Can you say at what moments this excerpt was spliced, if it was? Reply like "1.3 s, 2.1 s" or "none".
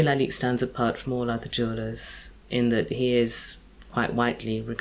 none